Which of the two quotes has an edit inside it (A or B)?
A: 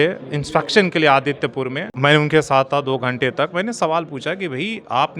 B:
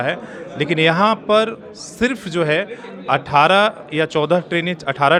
A